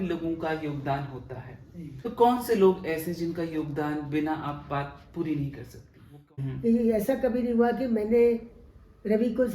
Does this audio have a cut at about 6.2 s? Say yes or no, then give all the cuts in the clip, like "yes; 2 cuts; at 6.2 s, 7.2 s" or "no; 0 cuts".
yes; 2 cuts; at 1.9 s, 6.2 s